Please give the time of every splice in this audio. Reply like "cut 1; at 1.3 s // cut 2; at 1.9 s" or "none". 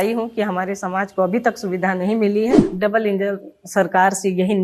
cut 1; at 2.7 s